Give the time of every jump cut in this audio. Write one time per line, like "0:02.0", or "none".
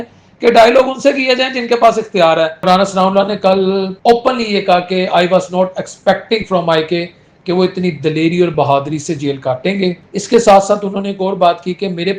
0:02.6
0:03.9
0:10.1